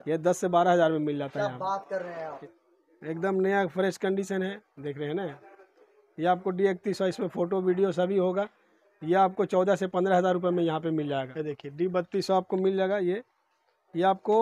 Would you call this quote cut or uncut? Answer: cut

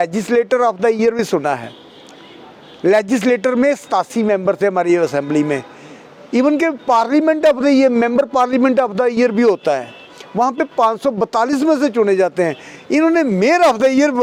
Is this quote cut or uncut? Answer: uncut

